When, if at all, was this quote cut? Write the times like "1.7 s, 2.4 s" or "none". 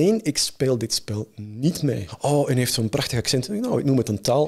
2.1 s